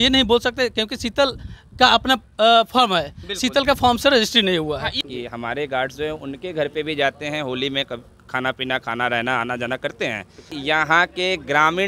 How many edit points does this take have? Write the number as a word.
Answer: two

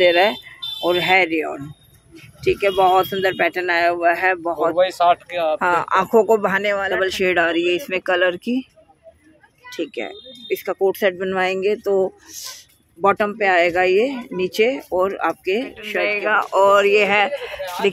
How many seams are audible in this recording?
two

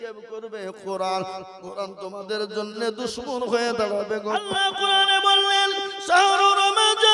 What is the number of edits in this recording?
one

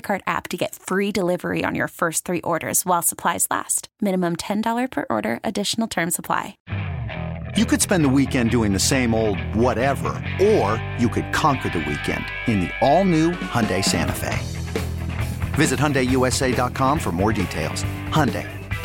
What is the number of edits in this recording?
one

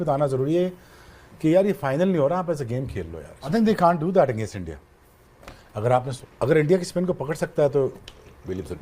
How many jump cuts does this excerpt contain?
two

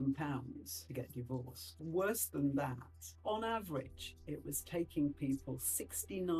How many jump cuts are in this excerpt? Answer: two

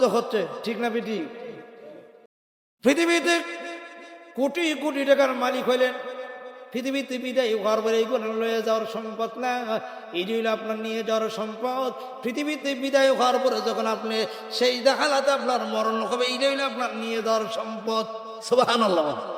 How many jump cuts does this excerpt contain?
one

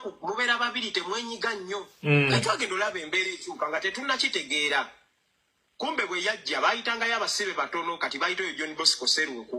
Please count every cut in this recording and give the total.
zero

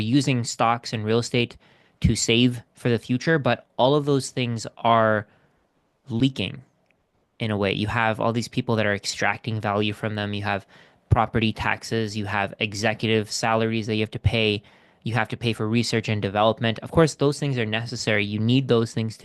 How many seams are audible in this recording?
zero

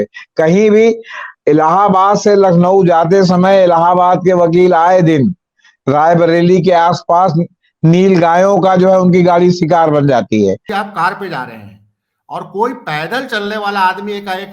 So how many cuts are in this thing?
one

